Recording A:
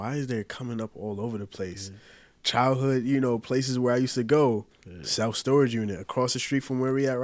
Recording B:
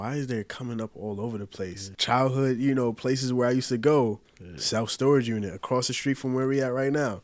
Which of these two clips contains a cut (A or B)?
B